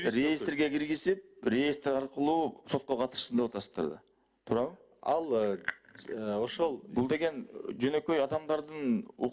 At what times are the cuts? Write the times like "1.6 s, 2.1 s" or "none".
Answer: none